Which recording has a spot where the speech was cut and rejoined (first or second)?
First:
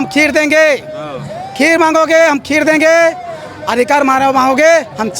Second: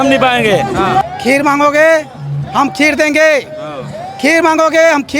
second